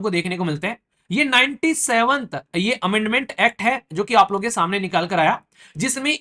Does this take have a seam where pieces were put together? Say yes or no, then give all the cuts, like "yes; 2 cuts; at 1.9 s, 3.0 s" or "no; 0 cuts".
no; 0 cuts